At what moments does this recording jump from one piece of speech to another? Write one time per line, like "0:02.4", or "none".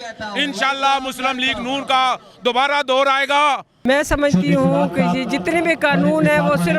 0:03.7

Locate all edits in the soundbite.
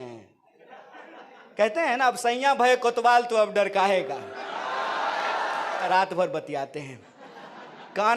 0:05.8

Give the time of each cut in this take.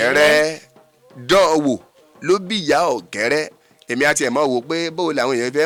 none

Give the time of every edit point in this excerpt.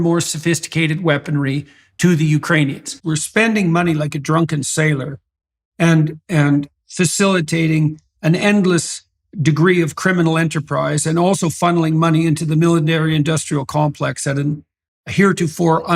0:02.9

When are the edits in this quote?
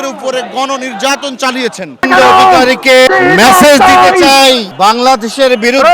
0:02.0
0:03.1
0:04.7

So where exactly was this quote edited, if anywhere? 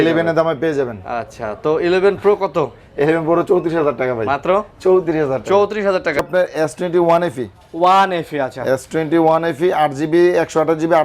0:06.2

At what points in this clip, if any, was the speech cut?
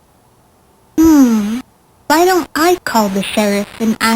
0:00.9

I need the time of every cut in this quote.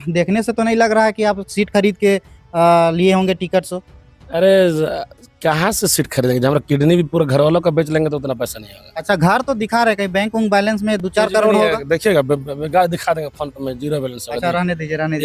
none

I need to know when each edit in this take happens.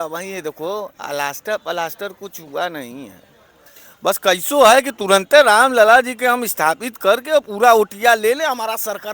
none

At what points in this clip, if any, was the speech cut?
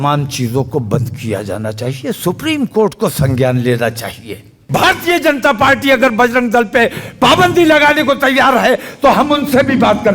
0:04.6

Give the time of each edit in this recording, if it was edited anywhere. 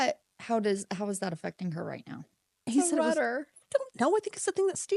0:02.7

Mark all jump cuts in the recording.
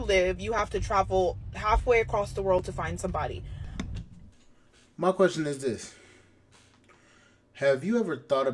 none

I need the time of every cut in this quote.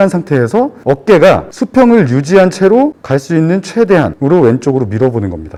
none

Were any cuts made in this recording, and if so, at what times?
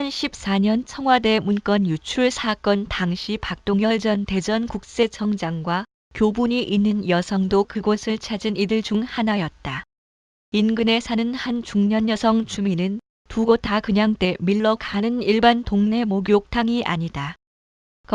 0:05.0

